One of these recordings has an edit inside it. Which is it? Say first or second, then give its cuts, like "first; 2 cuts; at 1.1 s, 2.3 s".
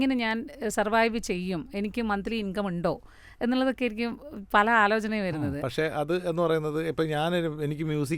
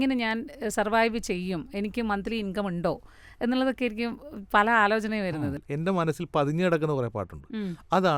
second; 1 cut; at 5.6 s